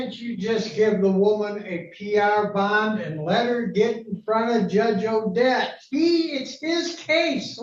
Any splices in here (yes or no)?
no